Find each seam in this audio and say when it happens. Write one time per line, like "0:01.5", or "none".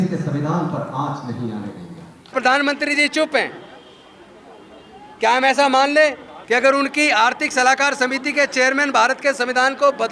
0:02.3
0:06.3